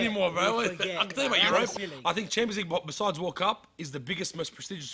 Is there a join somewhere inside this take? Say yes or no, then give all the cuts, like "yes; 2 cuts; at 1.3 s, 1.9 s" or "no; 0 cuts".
yes; 1 cut; at 1.7 s